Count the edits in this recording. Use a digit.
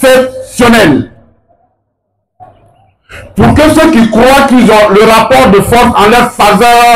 0